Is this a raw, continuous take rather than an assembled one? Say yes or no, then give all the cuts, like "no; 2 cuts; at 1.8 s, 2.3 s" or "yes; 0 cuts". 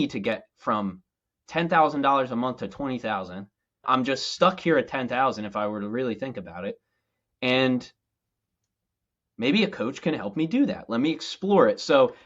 no; 1 cut; at 3.8 s